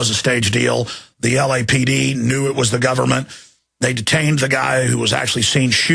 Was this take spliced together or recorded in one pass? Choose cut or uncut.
cut